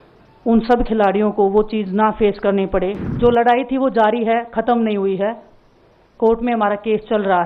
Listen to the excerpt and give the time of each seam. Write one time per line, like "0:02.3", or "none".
0:03.0